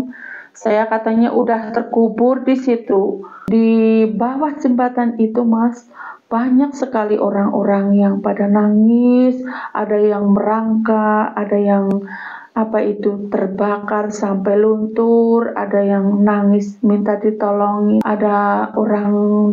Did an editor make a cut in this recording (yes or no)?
yes